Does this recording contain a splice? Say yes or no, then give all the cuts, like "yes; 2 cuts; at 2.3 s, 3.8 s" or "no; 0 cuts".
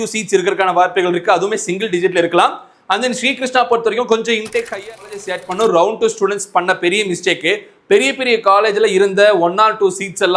yes; 1 cut; at 5.1 s